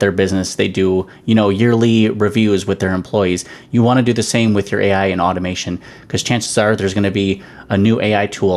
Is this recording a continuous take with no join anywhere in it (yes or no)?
yes